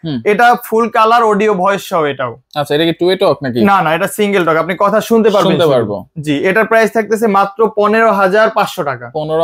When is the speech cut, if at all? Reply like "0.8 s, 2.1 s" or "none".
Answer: none